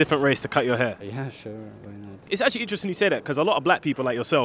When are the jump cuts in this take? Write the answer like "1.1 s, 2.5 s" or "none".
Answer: 1.0 s, 2.2 s